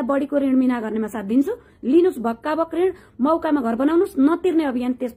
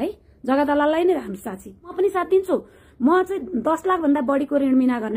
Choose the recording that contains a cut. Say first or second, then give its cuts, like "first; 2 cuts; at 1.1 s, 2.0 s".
second; 1 cut; at 1.9 s